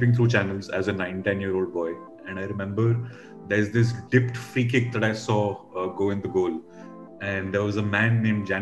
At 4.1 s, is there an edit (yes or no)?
no